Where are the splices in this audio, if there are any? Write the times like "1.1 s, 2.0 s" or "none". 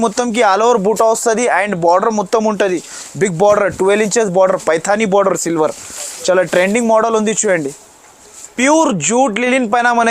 8.5 s